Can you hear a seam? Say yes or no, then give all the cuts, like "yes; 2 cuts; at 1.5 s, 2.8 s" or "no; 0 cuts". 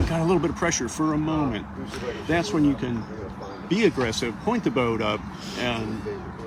no; 0 cuts